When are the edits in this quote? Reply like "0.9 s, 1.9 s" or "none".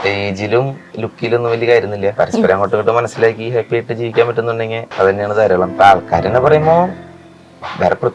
0.9 s, 2.1 s, 4.8 s, 5.7 s